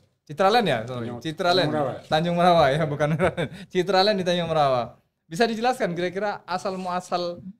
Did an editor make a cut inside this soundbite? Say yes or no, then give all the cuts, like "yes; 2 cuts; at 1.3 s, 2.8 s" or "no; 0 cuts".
no; 0 cuts